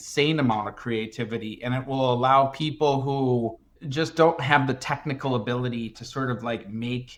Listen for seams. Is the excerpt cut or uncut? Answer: uncut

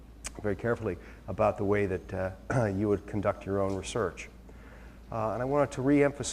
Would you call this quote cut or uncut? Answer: cut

